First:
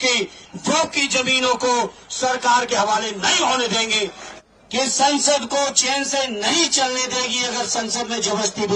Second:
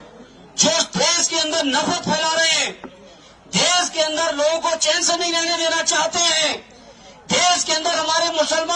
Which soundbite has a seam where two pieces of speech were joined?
first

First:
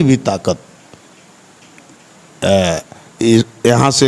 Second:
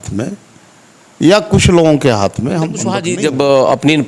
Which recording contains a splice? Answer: second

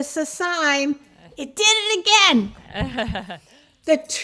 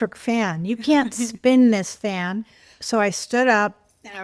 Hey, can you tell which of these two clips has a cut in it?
second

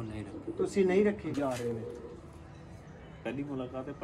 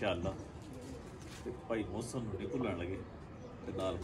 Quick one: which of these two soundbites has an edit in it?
first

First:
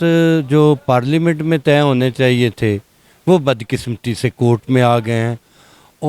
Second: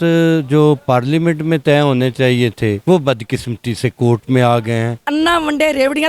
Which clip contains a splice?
second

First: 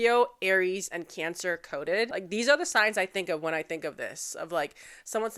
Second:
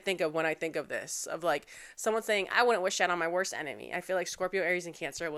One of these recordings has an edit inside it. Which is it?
first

